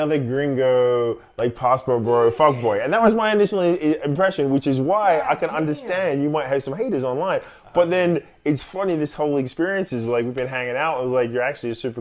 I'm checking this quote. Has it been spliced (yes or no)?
no